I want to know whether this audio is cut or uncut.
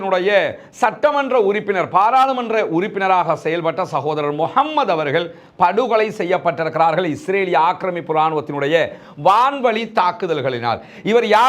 uncut